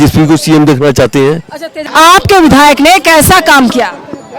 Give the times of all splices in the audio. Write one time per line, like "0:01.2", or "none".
0:01.8